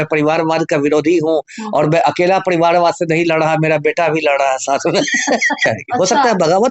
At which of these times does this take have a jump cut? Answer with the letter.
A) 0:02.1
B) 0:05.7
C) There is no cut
B